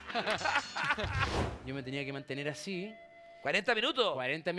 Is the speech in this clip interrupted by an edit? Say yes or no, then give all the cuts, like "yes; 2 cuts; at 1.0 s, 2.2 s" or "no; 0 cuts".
yes; 1 cut; at 1.4 s